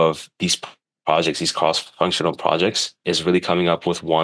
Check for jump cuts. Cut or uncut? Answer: uncut